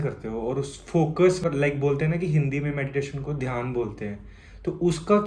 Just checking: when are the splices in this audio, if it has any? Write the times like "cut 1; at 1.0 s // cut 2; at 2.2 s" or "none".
cut 1; at 1.4 s